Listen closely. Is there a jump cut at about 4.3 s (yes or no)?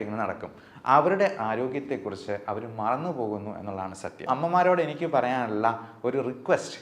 yes